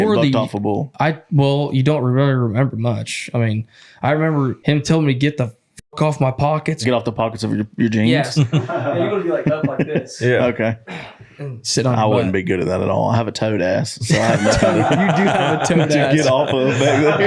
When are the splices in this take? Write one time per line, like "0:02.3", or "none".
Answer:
0:04.6
0:06.8
0:08.3
0:11.7